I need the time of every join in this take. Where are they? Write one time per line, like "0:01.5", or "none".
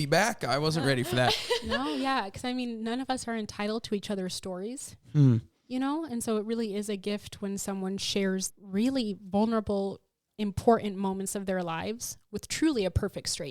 0:08.6
0:10.2